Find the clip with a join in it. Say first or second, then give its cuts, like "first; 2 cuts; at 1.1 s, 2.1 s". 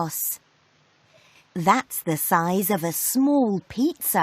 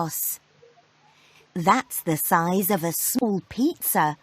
second; 1 cut; at 3.2 s